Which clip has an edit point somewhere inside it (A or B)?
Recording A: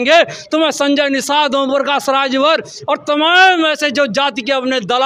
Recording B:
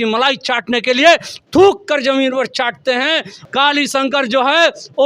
B